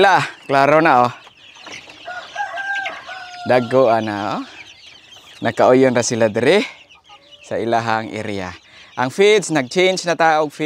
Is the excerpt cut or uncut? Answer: uncut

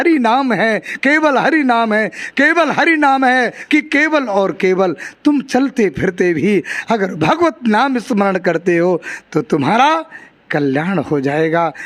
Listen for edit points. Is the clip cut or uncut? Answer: cut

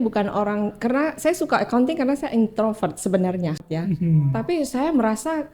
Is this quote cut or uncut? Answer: cut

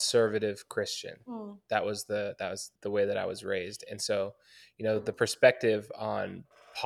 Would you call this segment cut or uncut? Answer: cut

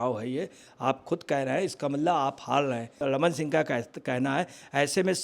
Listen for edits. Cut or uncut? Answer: cut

